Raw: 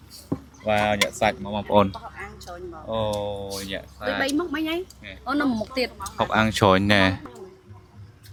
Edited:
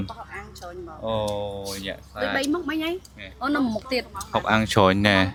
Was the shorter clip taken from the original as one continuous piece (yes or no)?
yes